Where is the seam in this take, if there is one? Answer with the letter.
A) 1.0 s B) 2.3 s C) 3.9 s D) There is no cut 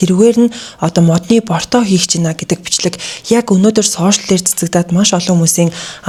D